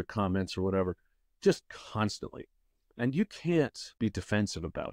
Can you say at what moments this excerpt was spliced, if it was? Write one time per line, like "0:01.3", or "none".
0:03.8

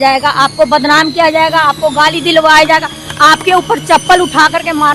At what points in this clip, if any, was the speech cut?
none

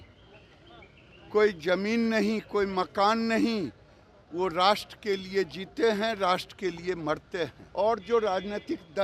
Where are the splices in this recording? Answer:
0:07.6

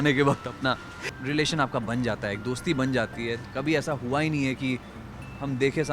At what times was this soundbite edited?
0:00.9
0:03.4

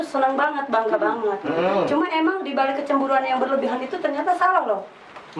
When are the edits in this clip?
none

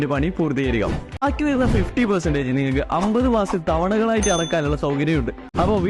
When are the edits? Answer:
none

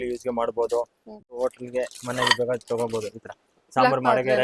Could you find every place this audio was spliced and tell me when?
0:01.3

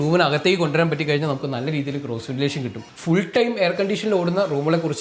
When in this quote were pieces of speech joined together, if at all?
0:02.9

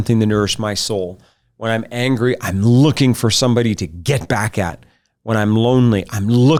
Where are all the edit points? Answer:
none

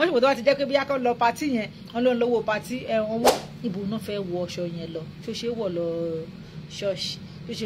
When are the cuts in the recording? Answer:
0:03.3

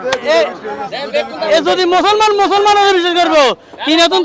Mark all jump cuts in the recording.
none

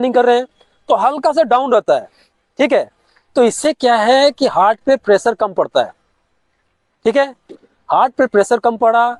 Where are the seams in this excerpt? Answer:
none

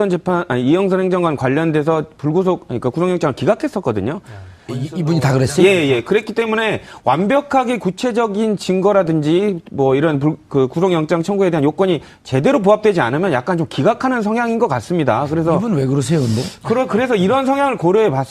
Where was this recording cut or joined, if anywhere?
0:16.6

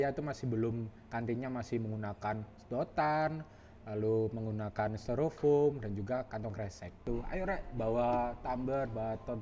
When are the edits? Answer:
0:07.0

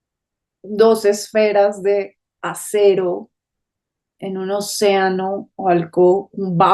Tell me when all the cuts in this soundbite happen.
none

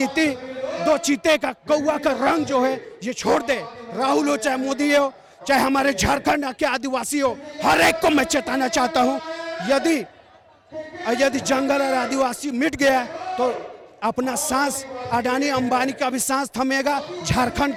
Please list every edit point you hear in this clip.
none

